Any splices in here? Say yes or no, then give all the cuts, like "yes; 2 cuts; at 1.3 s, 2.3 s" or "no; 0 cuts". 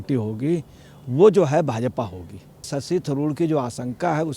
yes; 1 cut; at 2.8 s